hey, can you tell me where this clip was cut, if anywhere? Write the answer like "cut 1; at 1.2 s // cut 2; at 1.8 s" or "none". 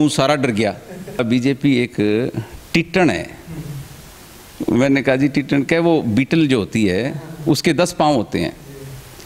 cut 1; at 1.3 s